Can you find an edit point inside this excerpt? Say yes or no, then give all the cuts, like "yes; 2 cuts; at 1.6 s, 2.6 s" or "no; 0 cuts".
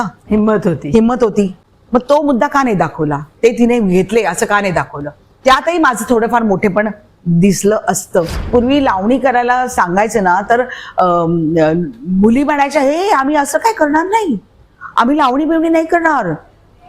yes; 2 cuts; at 1.6 s, 8.4 s